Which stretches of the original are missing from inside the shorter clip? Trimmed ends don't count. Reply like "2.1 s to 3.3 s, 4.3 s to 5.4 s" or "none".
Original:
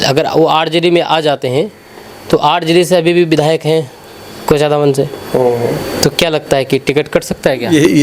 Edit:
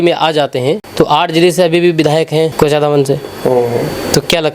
1.7 s to 2.2 s, 3.9 s to 4.4 s